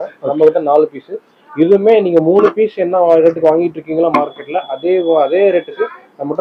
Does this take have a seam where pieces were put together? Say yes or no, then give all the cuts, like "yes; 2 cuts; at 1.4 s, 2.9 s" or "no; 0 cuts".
no; 0 cuts